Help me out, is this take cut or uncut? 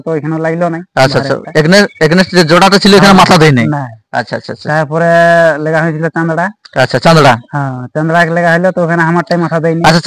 uncut